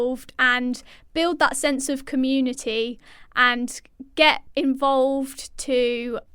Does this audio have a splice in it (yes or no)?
yes